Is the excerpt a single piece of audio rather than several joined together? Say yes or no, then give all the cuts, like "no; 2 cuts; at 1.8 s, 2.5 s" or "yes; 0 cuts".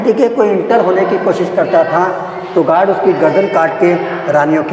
yes; 0 cuts